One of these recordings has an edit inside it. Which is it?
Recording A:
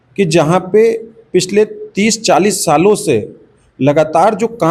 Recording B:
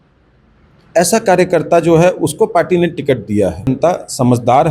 B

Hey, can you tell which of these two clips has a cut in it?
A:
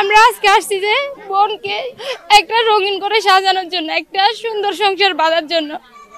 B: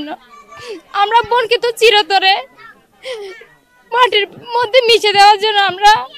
A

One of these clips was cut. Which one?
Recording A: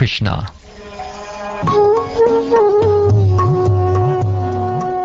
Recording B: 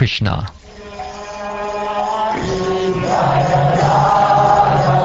B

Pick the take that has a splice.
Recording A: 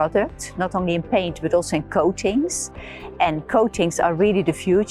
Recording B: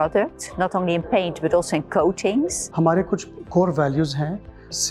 B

